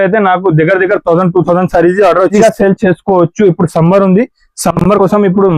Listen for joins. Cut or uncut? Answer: cut